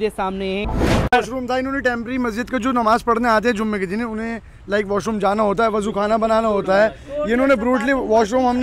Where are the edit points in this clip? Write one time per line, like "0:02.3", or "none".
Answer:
0:01.1